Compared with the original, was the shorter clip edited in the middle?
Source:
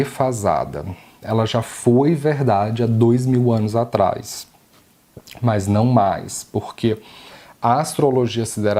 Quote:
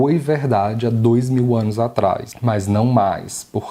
yes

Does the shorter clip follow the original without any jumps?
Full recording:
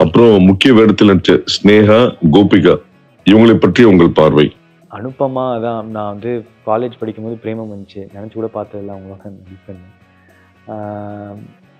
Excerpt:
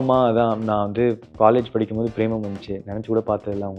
yes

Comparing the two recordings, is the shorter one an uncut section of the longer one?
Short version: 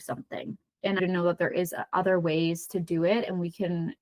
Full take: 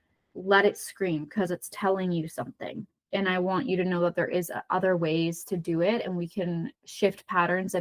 no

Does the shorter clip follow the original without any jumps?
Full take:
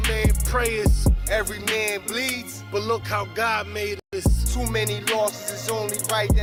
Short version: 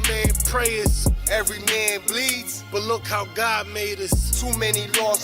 no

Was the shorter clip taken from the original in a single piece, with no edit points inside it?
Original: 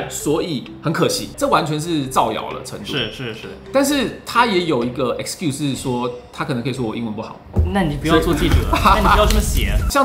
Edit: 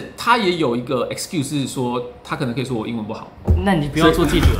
yes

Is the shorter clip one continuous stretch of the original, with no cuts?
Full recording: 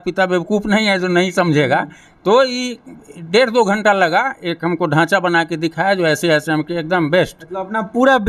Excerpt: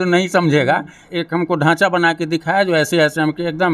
no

